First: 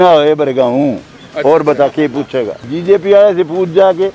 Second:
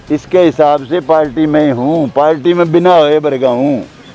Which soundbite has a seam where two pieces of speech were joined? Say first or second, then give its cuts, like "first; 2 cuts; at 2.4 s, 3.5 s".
first; 1 cut; at 2.6 s